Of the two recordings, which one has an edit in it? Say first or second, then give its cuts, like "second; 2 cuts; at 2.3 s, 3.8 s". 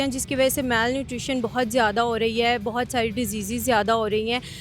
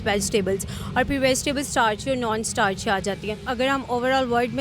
second; 1 cut; at 3.4 s